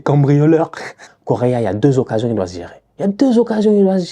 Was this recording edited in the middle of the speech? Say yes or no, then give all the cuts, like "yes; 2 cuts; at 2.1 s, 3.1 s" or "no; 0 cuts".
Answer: yes; 1 cut; at 1.1 s